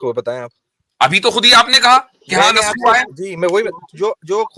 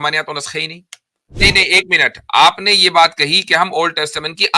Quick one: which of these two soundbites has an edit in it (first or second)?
second